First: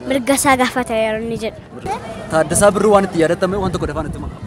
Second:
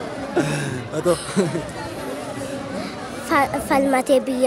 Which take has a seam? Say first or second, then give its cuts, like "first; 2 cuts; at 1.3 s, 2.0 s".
first; 1 cut; at 1.9 s